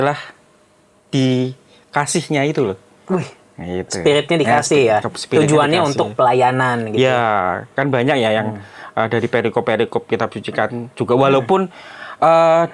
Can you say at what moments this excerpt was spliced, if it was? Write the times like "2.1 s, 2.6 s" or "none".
none